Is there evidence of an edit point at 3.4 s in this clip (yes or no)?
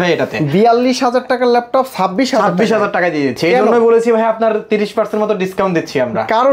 no